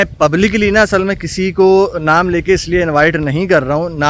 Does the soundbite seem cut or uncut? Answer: uncut